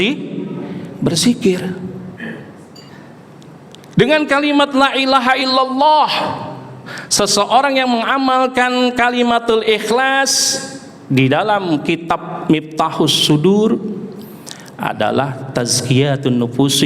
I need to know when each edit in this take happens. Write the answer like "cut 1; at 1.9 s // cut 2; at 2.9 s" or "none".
cut 1; at 2.9 s